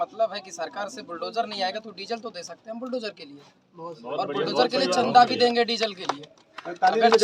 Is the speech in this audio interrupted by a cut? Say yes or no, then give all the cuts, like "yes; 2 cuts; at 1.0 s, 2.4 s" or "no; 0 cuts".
no; 0 cuts